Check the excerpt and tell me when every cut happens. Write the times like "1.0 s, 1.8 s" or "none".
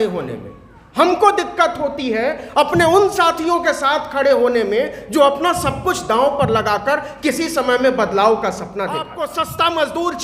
9.2 s